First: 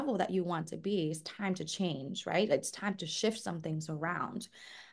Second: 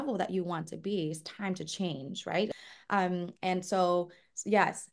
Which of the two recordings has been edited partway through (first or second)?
second